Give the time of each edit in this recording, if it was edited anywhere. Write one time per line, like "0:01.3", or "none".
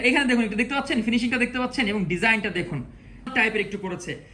0:03.3